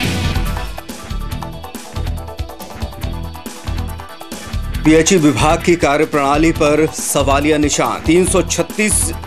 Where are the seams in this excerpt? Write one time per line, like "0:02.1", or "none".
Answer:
0:04.8